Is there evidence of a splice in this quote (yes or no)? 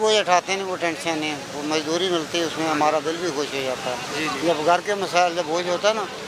no